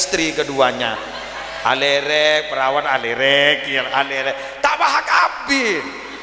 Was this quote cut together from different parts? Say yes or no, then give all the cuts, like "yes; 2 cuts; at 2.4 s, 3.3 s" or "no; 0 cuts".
no; 0 cuts